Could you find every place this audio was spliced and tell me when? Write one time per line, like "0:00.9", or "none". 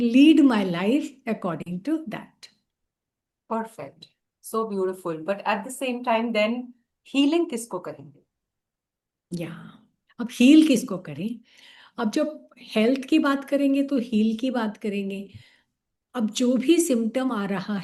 none